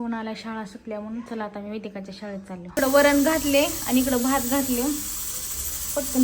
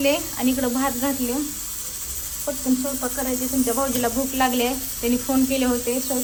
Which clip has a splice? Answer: first; 1 cut; at 2.6 s

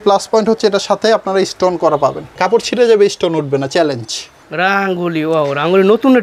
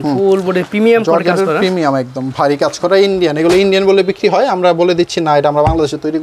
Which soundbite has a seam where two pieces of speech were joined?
first; 2 cuts; at 2.3 s, 4.4 s

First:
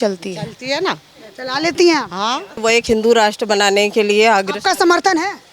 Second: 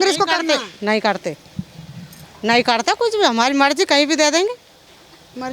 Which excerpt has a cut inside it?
first; 1 cut; at 2.5 s

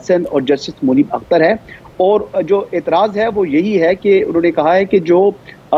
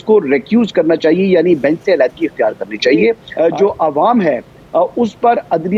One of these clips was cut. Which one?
second; 1 cut; at 3.3 s

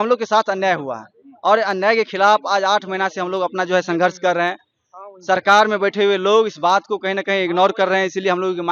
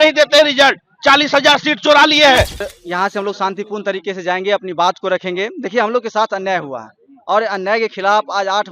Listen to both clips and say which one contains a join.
second; 1 cut; at 2.7 s

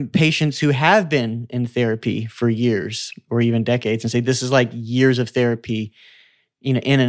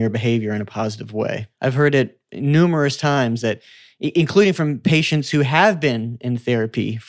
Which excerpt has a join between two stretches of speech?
second; 1 cut; at 1.5 s

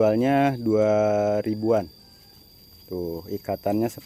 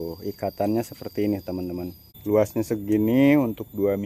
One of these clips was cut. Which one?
second; 1 cut; at 2.2 s

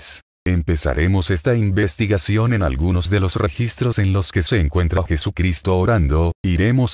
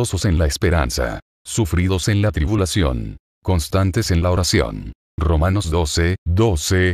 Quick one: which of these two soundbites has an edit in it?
second; 1 cut; at 5.5 s

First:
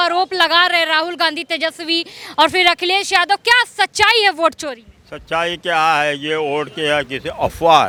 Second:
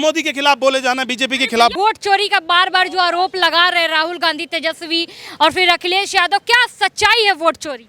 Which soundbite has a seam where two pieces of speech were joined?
second; 1 cut; at 1.7 s

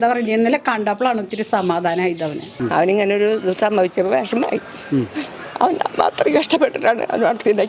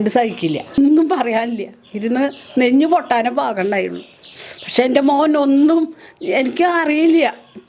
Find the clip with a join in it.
first; 1 cut; at 2.5 s

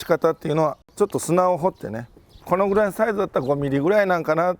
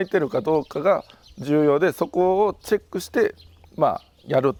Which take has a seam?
first; 2 cuts; at 0.9 s, 2.4 s

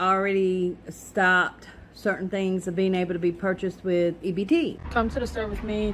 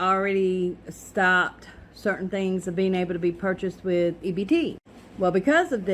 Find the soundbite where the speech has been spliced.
first; 1 cut; at 4.8 s

